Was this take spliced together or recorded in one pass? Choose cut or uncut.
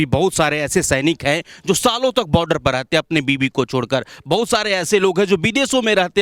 uncut